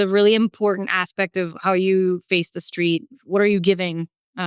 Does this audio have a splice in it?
yes; 1 cut; at 3.2 s

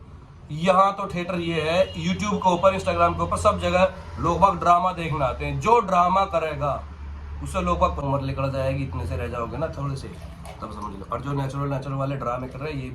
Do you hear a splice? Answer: yes; 1 cut; at 8.0 s

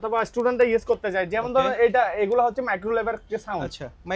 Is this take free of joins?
yes; 0 cuts

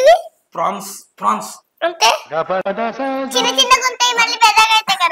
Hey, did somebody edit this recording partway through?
no; 0 cuts

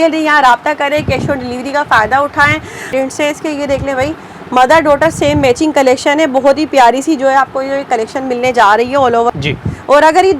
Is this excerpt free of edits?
no; 2 cuts; at 2.9 s, 9.4 s

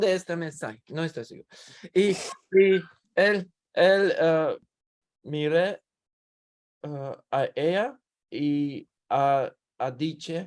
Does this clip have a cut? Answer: yes; 1 cut; at 4.7 s

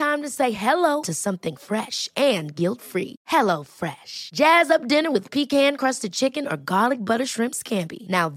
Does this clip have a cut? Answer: no; 0 cuts

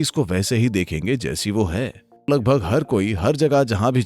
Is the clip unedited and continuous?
no; 1 cut; at 2.1 s

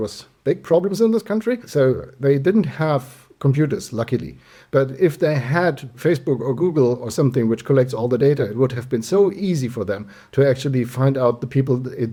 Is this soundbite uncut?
yes; 0 cuts

